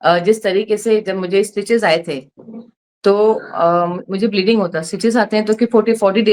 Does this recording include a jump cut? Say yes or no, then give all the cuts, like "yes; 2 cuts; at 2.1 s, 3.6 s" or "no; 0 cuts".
no; 0 cuts